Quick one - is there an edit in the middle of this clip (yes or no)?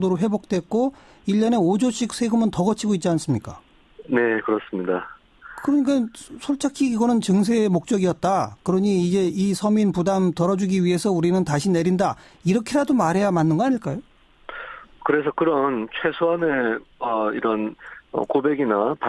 no